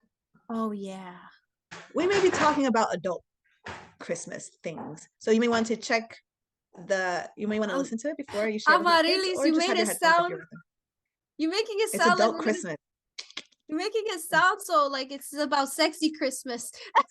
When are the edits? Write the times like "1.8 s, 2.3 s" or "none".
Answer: 1.8 s